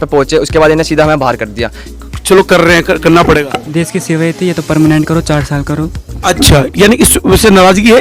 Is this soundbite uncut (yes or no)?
no